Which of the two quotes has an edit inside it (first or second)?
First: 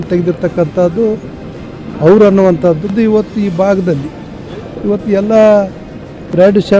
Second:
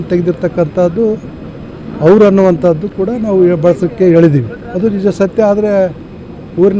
first